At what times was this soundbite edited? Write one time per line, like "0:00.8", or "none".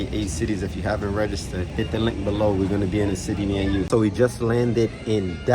0:01.5
0:03.9